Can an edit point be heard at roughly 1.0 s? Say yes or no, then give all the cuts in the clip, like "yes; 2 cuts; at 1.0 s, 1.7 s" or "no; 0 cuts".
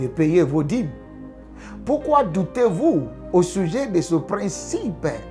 no; 0 cuts